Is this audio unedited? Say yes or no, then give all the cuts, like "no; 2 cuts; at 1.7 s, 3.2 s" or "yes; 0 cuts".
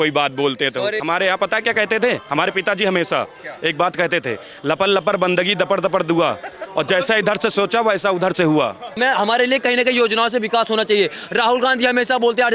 no; 2 cuts; at 1.0 s, 9.0 s